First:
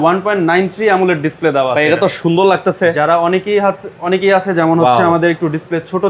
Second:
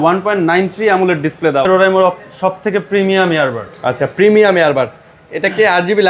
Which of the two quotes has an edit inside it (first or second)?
second